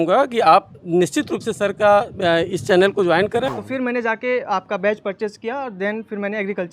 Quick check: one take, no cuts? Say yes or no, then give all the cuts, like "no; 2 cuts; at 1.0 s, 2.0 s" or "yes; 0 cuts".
no; 1 cut; at 3.4 s